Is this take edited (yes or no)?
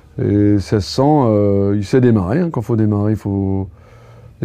no